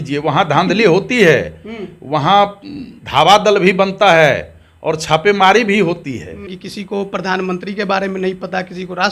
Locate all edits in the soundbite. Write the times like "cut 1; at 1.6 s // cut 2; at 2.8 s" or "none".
cut 1; at 6.5 s